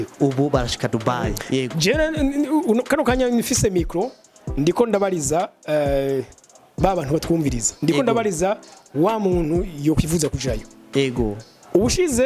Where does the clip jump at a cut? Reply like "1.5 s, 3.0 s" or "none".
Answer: 1.4 s

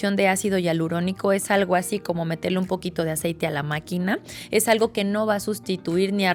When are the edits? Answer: none

